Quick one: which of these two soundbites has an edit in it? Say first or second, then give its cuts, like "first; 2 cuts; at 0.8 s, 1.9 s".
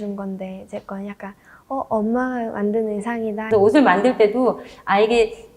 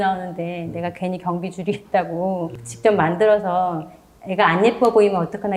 first; 1 cut; at 3.4 s